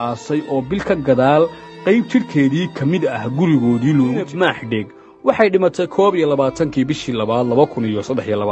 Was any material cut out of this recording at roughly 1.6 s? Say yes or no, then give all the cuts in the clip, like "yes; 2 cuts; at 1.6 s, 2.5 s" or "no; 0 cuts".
no; 1 cut; at 4.3 s